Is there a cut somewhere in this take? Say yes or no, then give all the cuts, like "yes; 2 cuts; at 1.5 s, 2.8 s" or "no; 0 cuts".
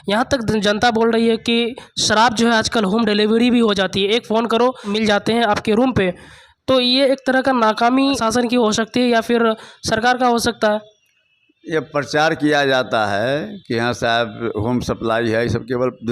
yes; 2 cuts; at 5.1 s, 8.2 s